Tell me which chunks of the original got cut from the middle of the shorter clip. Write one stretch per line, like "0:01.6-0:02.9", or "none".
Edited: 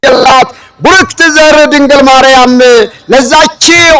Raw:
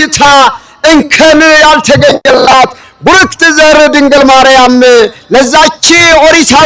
none